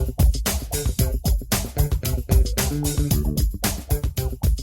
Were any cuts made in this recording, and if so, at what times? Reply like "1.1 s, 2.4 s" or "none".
3.1 s